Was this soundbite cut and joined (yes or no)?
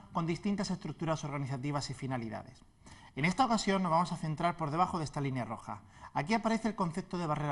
yes